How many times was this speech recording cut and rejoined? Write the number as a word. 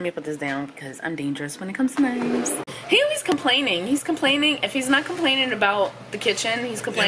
one